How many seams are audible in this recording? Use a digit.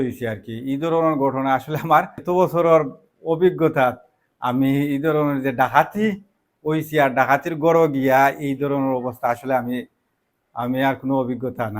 1